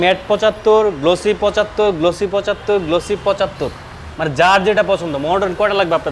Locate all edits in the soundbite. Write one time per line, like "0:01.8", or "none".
none